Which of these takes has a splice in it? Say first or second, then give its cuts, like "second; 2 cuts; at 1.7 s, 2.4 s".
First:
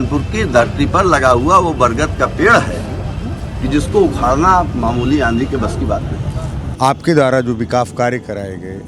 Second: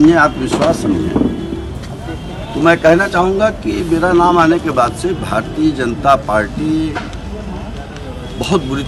first; 1 cut; at 6.6 s